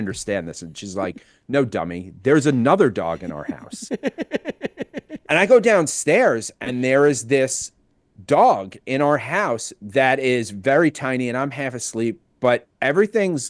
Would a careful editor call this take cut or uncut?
uncut